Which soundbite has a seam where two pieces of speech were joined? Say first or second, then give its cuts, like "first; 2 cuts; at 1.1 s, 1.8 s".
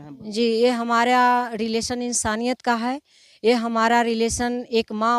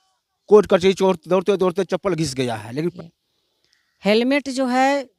second; 1 cut; at 2.9 s